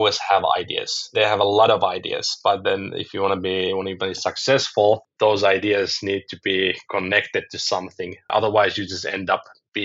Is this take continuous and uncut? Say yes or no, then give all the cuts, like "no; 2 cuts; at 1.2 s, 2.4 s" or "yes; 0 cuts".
no; 2 cuts; at 1.1 s, 8.3 s